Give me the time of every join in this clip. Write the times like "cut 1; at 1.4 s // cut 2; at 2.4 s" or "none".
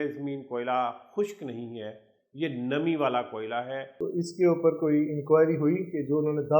cut 1; at 3.9 s